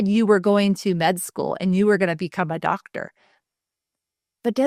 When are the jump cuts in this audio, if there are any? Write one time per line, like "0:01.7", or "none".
none

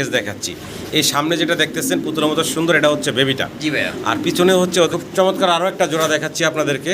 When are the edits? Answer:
0:04.9

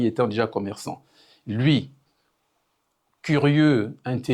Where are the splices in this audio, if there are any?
none

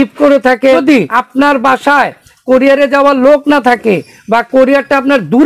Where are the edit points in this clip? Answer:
0:01.0

